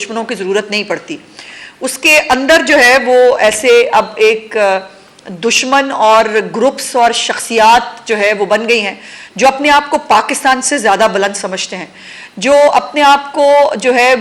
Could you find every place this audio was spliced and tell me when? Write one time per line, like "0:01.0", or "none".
none